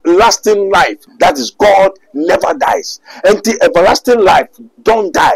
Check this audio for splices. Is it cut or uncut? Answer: cut